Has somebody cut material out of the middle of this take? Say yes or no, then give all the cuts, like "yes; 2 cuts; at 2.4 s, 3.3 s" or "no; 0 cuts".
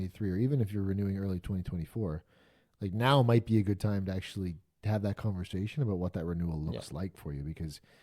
no; 0 cuts